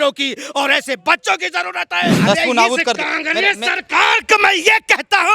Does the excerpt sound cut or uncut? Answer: cut